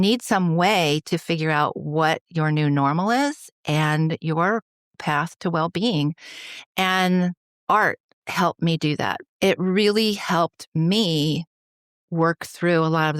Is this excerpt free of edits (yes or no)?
no